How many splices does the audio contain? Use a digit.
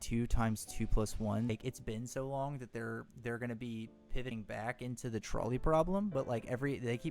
1